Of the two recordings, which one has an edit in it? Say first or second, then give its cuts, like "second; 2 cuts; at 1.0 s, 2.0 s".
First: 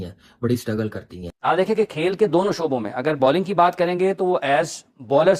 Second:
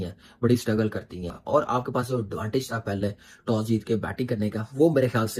first; 1 cut; at 1.3 s